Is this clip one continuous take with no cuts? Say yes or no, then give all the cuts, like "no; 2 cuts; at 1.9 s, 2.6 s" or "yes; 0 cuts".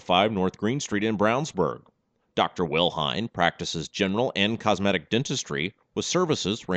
yes; 0 cuts